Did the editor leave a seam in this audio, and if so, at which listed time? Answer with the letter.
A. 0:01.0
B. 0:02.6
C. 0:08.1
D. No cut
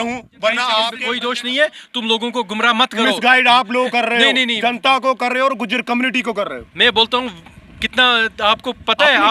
A